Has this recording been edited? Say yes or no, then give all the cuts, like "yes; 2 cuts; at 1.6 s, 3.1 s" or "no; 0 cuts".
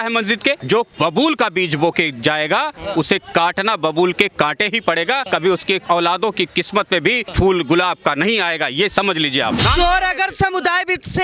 yes; 1 cut; at 9.6 s